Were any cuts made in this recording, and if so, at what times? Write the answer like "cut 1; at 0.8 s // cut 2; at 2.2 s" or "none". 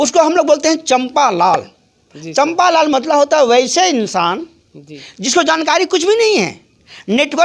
none